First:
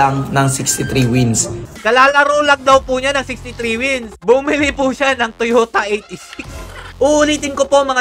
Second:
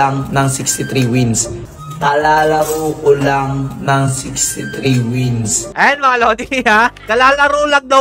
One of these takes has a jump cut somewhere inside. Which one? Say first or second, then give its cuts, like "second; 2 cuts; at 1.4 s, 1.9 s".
first; 2 cuts; at 1.8 s, 6.9 s